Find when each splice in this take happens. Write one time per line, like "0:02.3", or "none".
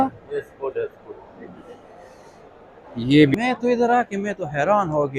0:03.3